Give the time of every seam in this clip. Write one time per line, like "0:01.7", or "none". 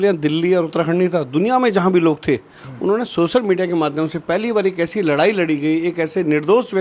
none